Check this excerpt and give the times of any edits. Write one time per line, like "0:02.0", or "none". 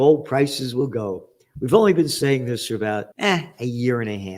0:03.1